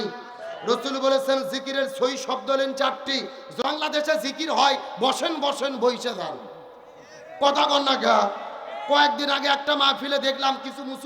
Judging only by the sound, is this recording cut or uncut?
cut